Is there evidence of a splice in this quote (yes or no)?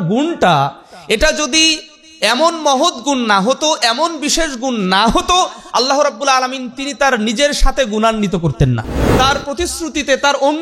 yes